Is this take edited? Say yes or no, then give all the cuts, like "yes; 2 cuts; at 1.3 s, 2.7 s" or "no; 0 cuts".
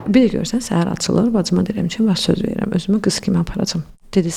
no; 0 cuts